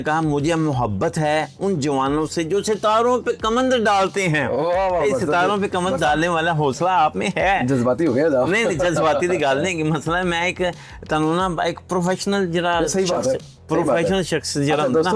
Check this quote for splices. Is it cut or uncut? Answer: uncut